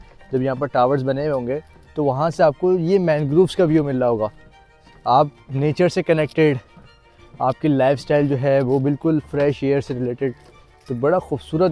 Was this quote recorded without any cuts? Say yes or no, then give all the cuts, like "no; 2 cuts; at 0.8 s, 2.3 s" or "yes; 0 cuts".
yes; 0 cuts